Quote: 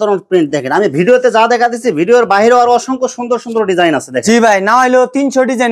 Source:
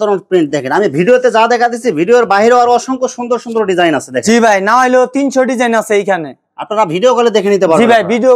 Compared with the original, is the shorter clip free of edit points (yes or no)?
yes